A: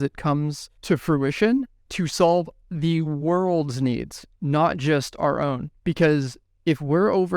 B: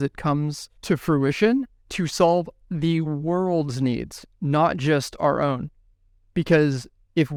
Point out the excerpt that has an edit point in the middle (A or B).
A